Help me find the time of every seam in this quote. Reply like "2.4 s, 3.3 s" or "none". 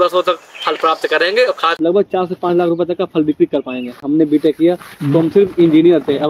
1.8 s, 4.0 s